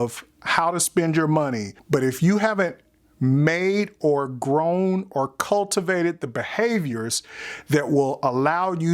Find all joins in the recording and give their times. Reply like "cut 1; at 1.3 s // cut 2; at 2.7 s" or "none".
cut 1; at 1.7 s